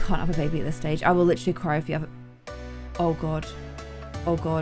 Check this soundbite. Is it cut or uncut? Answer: uncut